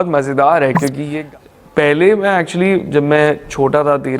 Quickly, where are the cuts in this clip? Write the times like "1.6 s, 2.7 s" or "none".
1.0 s